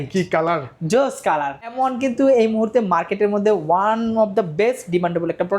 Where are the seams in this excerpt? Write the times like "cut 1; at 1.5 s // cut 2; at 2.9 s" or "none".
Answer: cut 1; at 1.7 s

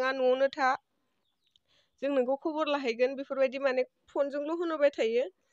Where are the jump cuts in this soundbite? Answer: none

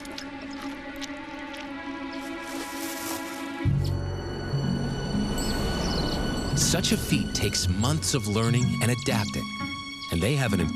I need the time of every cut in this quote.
cut 1; at 4.8 s

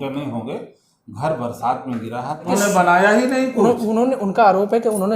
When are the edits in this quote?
cut 1; at 2.5 s

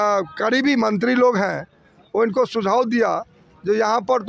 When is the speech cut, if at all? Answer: none

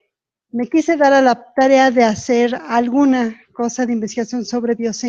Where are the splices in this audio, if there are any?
cut 1; at 2.3 s

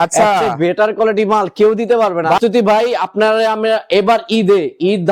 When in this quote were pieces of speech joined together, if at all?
cut 1; at 2.4 s

